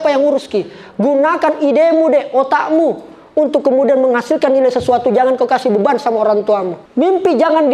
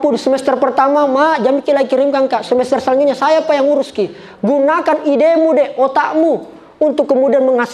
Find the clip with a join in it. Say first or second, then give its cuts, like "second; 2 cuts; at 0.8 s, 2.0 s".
first; 1 cut; at 6.8 s